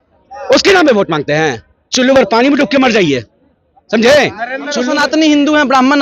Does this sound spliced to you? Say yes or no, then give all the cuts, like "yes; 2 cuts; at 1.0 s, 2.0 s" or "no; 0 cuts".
yes; 1 cut; at 4.8 s